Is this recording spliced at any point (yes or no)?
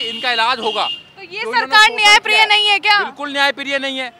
no